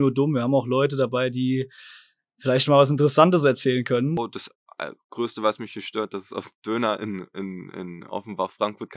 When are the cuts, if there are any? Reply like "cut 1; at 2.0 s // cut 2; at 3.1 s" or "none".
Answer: cut 1; at 4.2 s